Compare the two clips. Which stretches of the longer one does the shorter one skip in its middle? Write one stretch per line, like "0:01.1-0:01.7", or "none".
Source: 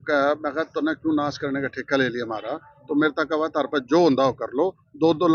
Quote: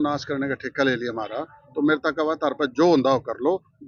none